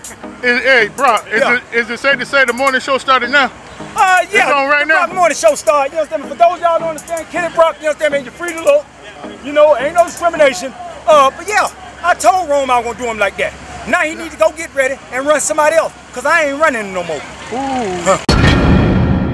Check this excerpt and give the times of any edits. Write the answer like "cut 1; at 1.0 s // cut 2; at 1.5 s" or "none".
cut 1; at 18.2 s